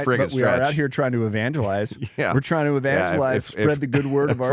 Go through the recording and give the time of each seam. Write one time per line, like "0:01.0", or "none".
none